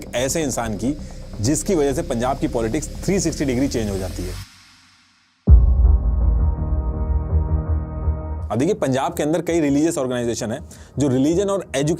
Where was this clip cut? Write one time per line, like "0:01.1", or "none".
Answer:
none